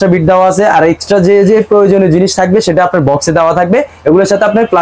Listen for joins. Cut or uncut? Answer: uncut